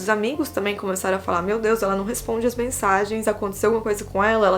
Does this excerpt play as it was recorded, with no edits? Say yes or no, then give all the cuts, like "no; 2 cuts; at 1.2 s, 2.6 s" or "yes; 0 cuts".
yes; 0 cuts